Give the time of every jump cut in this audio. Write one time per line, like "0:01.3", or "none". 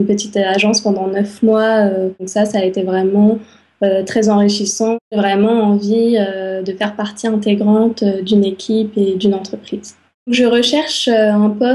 0:02.2
0:05.2
0:10.3